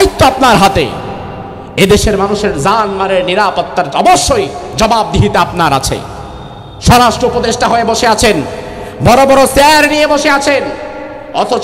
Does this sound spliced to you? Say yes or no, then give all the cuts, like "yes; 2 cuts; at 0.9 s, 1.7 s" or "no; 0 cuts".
no; 0 cuts